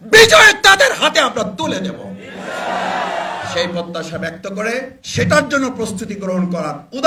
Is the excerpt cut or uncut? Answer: uncut